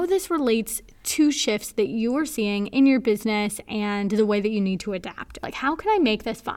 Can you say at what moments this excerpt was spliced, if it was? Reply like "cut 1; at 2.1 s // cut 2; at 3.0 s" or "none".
cut 1; at 5.4 s